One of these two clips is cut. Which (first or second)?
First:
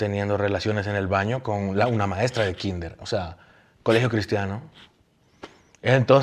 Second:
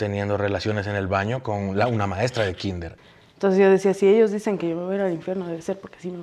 second